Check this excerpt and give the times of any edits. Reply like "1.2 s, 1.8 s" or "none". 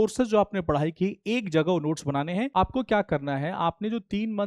2.5 s